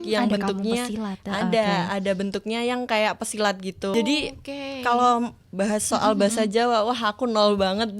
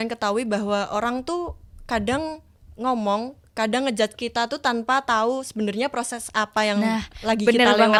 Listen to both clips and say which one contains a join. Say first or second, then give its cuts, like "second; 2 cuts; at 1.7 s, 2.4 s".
first; 1 cut; at 3.9 s